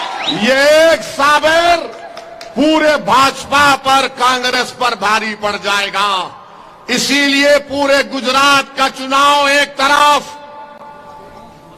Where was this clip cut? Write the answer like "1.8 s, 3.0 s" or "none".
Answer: none